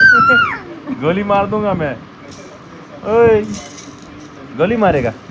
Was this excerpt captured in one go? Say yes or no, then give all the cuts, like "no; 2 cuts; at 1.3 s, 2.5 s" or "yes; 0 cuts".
yes; 0 cuts